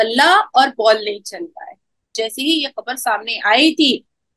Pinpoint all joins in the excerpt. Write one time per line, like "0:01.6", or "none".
0:02.1

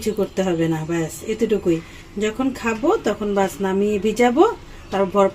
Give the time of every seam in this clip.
none

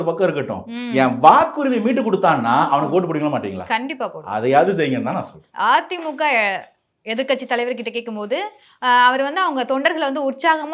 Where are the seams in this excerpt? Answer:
none

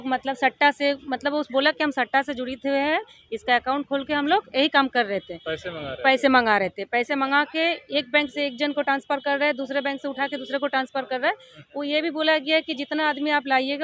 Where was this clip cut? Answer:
none

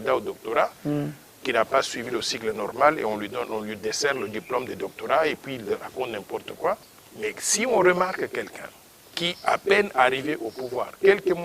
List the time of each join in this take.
0:06.9

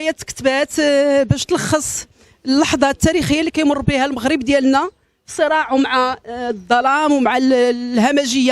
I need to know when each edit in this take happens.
0:05.0

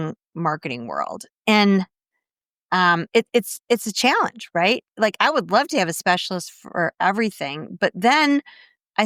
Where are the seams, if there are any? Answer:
none

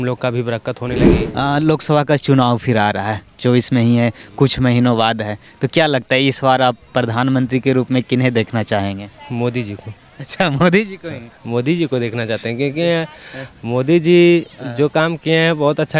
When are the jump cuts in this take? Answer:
0:01.1

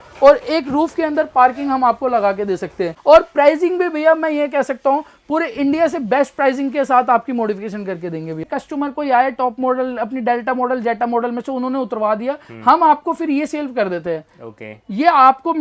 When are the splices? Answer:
0:02.9
0:08.4

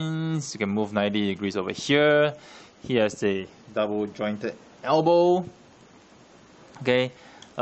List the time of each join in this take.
0:04.1

